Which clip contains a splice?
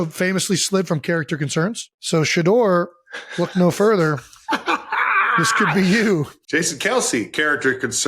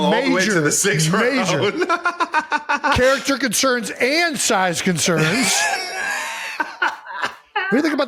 first; 2 cuts; at 1.9 s, 6.4 s

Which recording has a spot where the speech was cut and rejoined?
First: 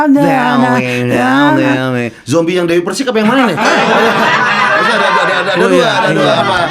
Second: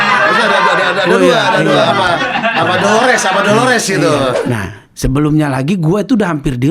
second; 1 cut; at 4.4 s

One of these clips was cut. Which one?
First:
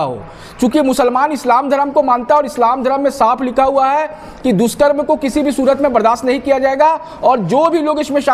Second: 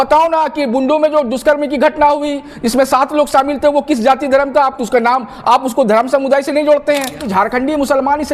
second; 1 cut; at 7.2 s

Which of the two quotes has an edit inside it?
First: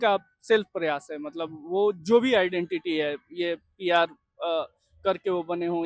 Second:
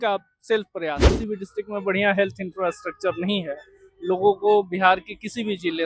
second; 1 cut; at 1.1 s

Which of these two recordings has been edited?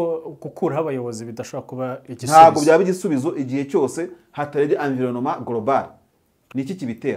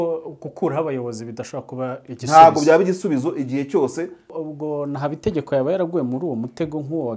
second; 1 cut; at 4.3 s

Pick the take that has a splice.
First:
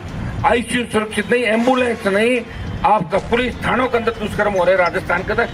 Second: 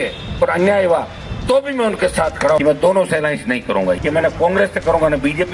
second; 2 cuts; at 2.6 s, 4.0 s

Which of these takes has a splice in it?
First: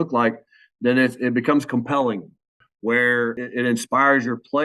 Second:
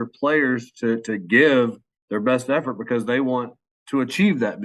first; 2 cuts; at 2.6 s, 3.4 s

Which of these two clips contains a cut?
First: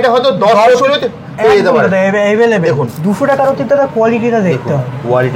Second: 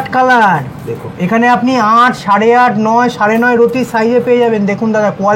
first; 1 cut; at 2.9 s

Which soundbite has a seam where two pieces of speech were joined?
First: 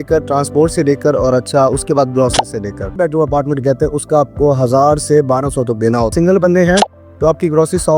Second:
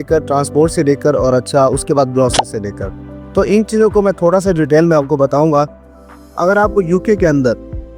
first; 2 cuts; at 2.9 s, 6.1 s

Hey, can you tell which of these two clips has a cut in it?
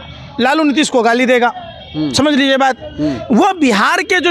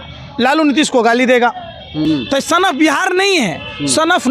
second; 1 cut; at 2.0 s

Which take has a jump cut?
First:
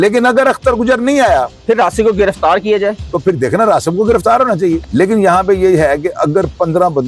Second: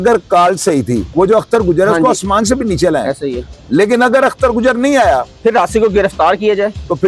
first; 1 cut; at 4.8 s

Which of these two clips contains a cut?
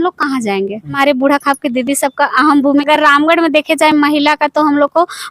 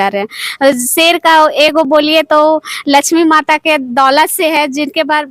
first; 2 cuts; at 1.0 s, 2.8 s

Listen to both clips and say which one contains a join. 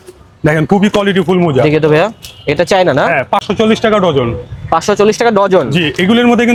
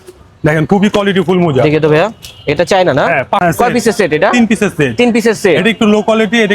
second; 1 cut; at 3.4 s

